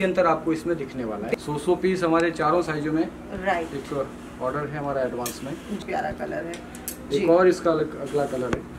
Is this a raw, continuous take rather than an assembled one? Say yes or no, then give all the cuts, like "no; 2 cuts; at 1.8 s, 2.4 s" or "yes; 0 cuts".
no; 2 cuts; at 1.3 s, 5.8 s